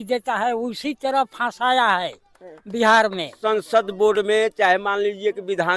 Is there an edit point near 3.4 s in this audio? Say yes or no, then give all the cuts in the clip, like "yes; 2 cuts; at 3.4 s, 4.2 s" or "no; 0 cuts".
yes; 1 cut; at 3.4 s